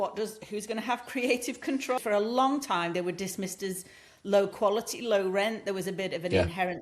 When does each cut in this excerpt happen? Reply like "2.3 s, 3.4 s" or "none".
2.0 s

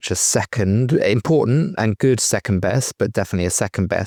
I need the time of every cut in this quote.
none

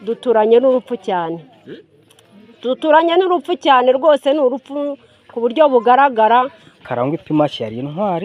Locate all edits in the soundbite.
6.6 s

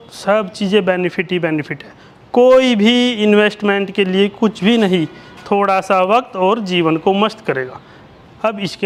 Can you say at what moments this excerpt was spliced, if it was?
none

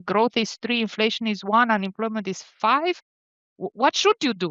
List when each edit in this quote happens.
2.5 s

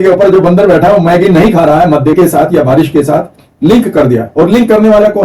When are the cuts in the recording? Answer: 2.2 s

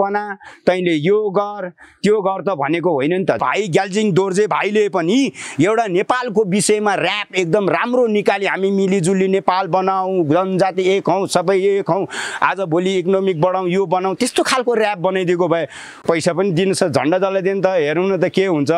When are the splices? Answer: 3.4 s, 15.9 s

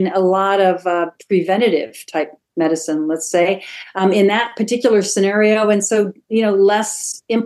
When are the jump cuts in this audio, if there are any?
none

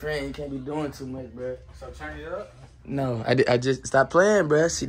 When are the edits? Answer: none

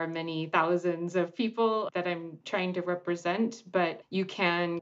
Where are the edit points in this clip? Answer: 1.9 s

